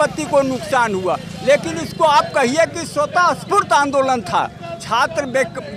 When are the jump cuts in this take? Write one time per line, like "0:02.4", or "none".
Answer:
none